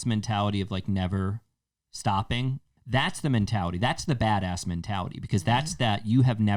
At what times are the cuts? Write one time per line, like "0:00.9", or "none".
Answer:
0:02.7